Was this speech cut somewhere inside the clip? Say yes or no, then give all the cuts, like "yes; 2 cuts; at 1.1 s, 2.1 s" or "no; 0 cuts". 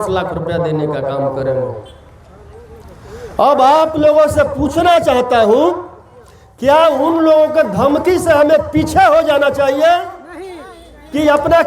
no; 0 cuts